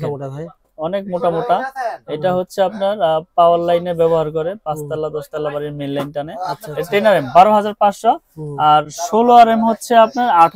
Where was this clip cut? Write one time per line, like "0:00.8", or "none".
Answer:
none